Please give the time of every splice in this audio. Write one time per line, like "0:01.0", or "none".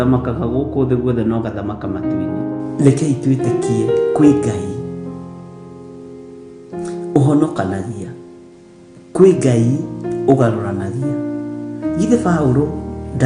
none